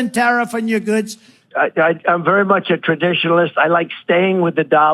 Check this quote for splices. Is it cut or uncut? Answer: cut